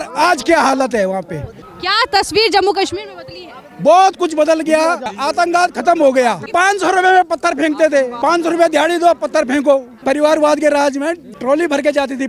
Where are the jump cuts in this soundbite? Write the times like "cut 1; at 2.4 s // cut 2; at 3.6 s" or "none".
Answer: cut 1; at 1.6 s // cut 2; at 5.1 s // cut 3; at 6.4 s // cut 4; at 8.1 s // cut 5; at 9.9 s // cut 6; at 11.3 s